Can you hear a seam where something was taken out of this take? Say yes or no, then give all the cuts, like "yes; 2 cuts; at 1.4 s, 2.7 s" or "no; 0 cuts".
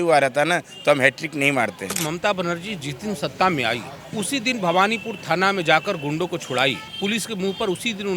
yes; 3 cuts; at 2.0 s, 4.0 s, 6.9 s